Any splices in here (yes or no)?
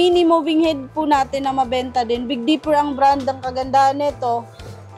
no